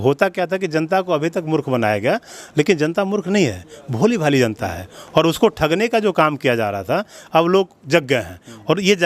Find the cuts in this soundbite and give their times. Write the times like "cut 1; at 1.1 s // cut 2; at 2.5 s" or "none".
none

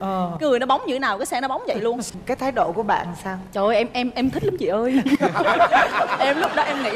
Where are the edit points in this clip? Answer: cut 1; at 2.0 s

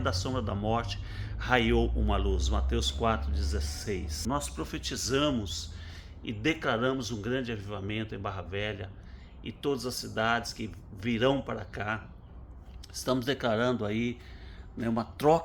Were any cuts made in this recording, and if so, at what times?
cut 1; at 4.2 s

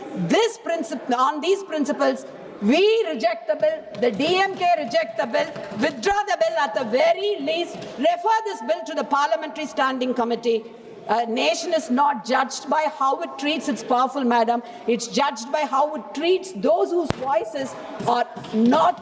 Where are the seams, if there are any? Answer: none

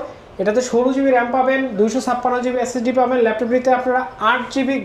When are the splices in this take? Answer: none

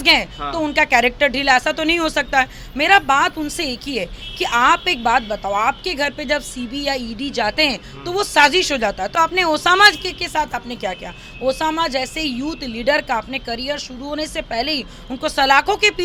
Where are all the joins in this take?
none

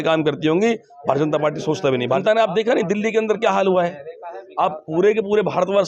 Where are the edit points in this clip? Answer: cut 1; at 2.2 s

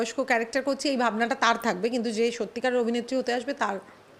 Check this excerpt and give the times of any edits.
none

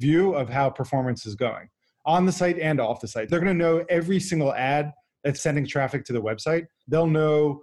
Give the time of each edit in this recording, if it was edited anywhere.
cut 1; at 3.3 s // cut 2; at 5.4 s // cut 3; at 6.8 s

